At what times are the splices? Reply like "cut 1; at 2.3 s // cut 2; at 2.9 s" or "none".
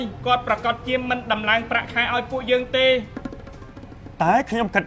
none